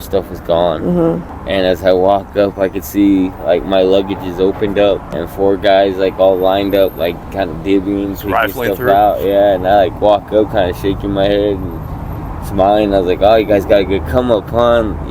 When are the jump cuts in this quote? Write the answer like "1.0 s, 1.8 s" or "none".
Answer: 1.3 s, 5.1 s